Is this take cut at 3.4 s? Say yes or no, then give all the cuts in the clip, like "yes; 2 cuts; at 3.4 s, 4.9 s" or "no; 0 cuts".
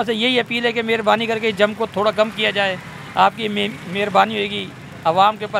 no; 0 cuts